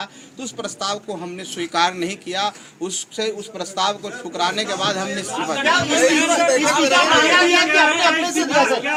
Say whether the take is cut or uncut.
uncut